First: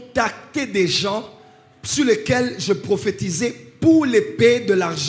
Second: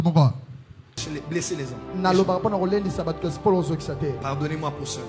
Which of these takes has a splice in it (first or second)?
second